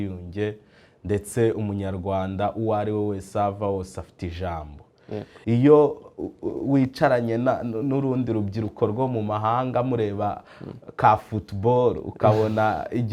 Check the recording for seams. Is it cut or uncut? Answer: cut